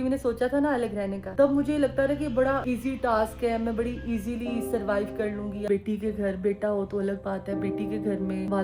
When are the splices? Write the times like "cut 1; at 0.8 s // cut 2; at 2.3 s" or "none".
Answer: cut 1; at 5.6 s

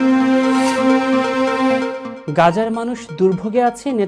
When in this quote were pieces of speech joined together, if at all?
cut 1; at 2.1 s

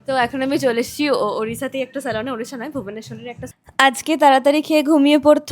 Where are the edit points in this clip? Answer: cut 1; at 3.5 s

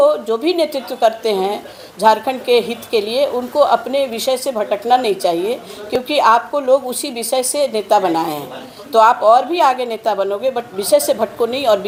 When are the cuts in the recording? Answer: none

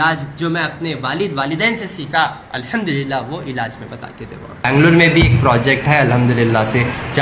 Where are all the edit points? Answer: cut 1; at 2.5 s // cut 2; at 4.7 s

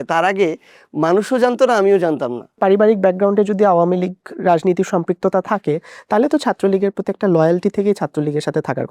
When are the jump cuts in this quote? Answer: cut 1; at 2.6 s

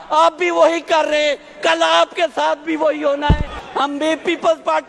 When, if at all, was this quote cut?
cut 1; at 3.6 s

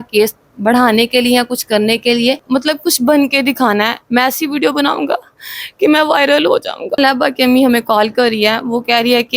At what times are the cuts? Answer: cut 1; at 2.4 s // cut 2; at 7.0 s

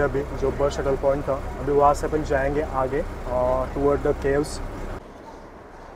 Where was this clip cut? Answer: cut 1; at 5.0 s

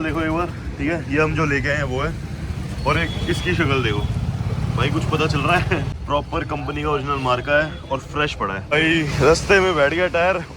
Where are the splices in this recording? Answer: cut 1; at 5.9 s // cut 2; at 8.6 s

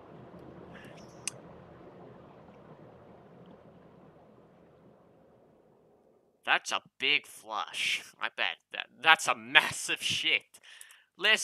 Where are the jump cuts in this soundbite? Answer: none

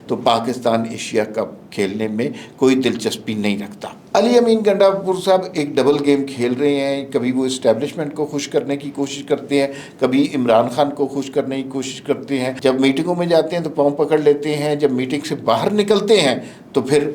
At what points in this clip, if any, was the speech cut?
cut 1; at 3.9 s // cut 2; at 12.5 s

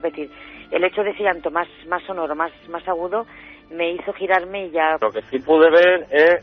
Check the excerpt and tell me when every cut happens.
cut 1; at 5.0 s

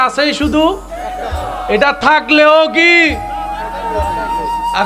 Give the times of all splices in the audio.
none

